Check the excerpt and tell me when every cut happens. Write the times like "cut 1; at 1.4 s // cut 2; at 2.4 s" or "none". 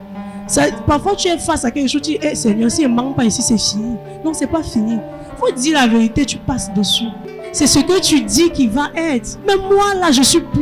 cut 1; at 7.1 s // cut 2; at 9.3 s

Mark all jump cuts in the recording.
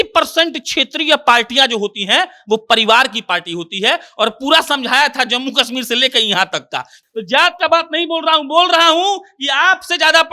cut 1; at 7.0 s

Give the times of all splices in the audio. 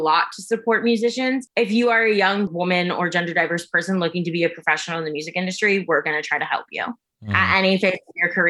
cut 1; at 1.5 s // cut 2; at 2.5 s

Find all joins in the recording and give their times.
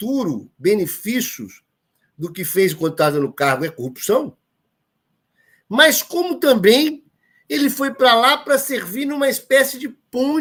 none

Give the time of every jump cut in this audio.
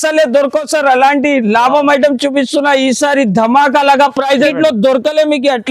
cut 1; at 4.5 s

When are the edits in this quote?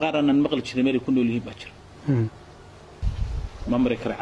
cut 1; at 3.0 s

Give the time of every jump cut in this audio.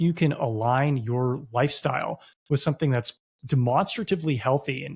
none

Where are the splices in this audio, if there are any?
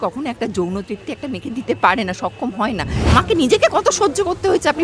cut 1; at 3.1 s

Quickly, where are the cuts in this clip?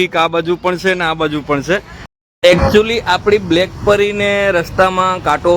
cut 1; at 2.0 s

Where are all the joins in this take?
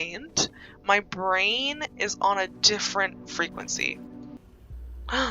cut 1; at 4.4 s

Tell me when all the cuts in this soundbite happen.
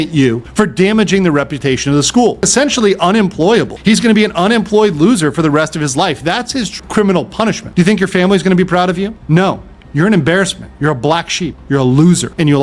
cut 1; at 2.5 s // cut 2; at 6.7 s // cut 3; at 7.6 s

